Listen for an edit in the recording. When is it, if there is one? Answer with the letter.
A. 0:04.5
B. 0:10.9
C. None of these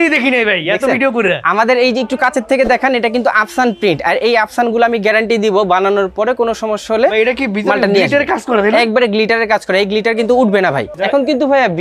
B